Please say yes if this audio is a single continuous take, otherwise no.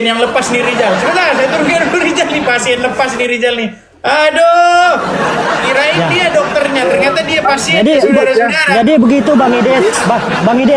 yes